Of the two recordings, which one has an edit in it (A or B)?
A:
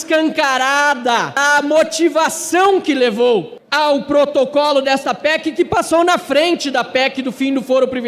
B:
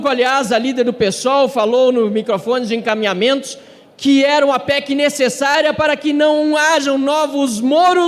A